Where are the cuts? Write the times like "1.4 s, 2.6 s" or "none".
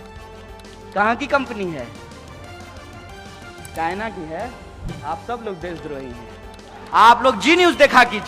6.7 s